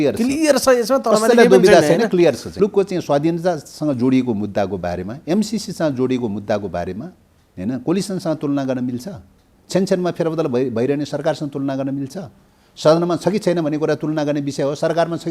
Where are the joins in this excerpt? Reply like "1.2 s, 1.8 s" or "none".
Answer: 2.6 s